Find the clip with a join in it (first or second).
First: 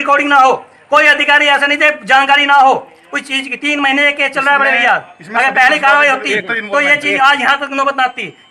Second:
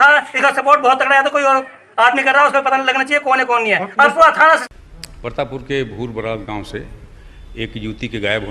second